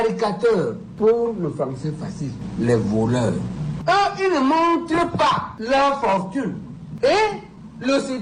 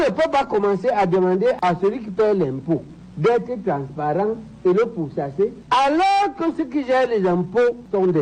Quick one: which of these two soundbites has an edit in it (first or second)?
second